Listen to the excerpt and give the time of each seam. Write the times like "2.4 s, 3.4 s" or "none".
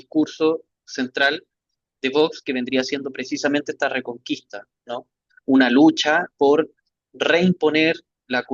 none